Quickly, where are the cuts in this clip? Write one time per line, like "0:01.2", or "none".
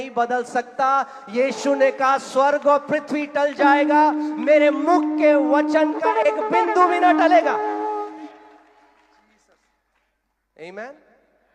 none